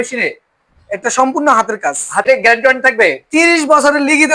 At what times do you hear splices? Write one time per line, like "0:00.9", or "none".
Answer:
0:02.3